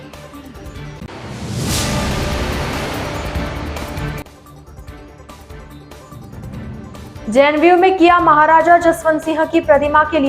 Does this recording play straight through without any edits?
no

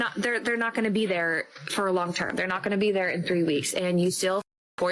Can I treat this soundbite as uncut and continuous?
yes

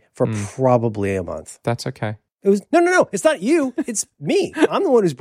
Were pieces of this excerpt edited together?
yes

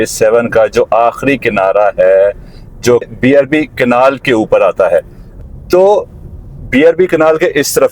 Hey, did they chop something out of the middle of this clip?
yes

